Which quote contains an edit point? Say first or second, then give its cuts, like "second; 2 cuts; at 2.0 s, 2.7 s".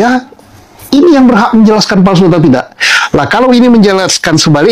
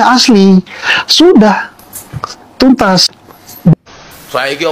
second; 1 cut; at 3.7 s